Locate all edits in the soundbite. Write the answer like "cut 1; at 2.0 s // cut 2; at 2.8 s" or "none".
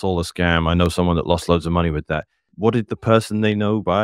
cut 1; at 2.5 s